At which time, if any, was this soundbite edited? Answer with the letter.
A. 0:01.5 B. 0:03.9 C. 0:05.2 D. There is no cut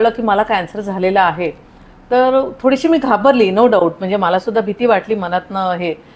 D